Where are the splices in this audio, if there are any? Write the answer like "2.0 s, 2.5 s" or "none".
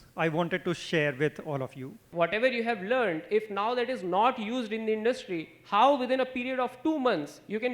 2.0 s